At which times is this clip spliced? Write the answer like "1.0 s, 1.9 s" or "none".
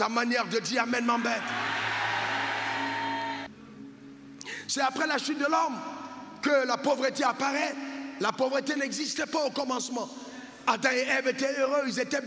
3.5 s